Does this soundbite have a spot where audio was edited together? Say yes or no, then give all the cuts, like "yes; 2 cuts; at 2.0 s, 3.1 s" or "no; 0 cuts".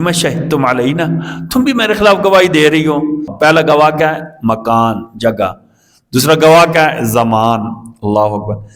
yes; 1 cut; at 3.3 s